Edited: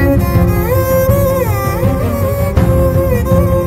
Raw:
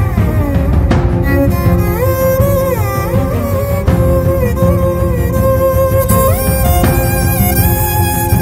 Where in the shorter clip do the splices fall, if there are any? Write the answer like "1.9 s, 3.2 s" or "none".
none

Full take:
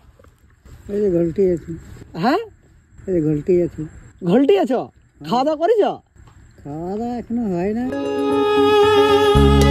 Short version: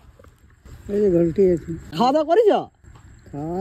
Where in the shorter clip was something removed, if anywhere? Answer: 1.8 s

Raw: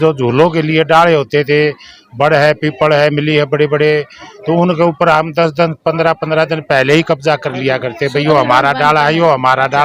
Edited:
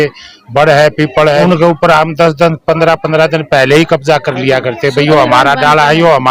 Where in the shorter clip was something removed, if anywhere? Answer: 1.4 s

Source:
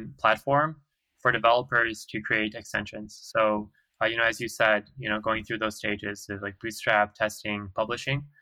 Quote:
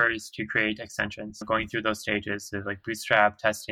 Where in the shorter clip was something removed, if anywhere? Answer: 1.4 s

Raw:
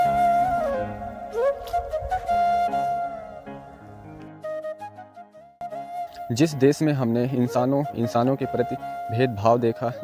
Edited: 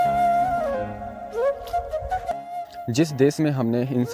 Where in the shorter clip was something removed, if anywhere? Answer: 2.3 s

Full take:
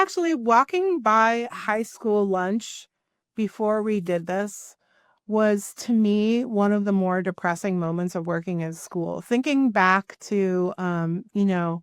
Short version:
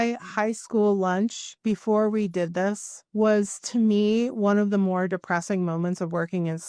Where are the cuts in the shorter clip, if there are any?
1.5 s, 2.9 s

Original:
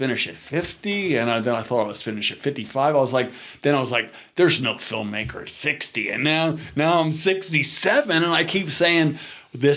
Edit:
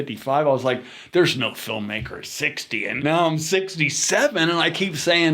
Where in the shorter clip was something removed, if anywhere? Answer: 0.9 s, 2.9 s

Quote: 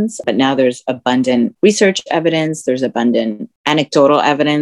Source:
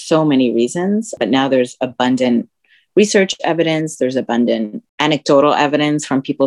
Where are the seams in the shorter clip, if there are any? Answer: 1.5 s

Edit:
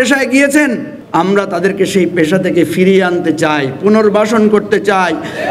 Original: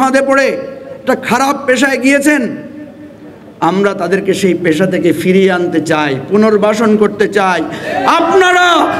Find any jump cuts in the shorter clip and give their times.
0.9 s

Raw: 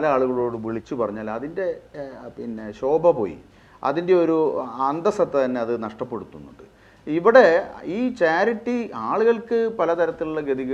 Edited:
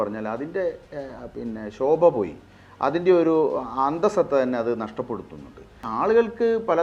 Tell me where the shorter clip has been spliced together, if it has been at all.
5.8 s

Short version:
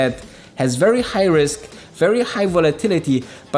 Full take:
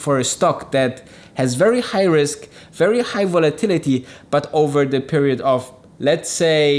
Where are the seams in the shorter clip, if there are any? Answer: none

